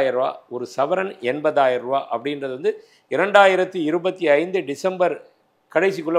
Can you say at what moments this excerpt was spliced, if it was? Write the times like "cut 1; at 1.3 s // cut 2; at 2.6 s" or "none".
none